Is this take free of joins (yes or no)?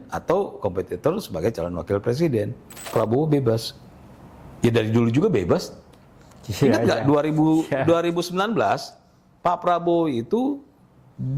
no